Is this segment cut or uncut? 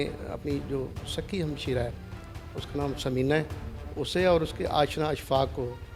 uncut